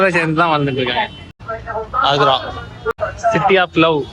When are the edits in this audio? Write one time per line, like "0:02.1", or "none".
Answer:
0:01.5
0:03.0